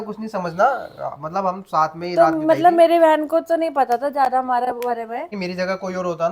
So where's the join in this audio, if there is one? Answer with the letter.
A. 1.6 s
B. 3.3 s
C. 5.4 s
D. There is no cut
C